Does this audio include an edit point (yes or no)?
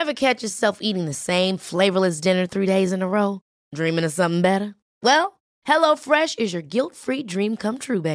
no